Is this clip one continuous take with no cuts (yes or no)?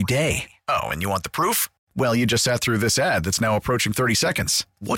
yes